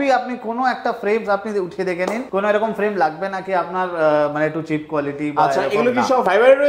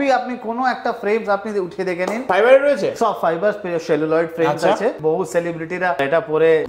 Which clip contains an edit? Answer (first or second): second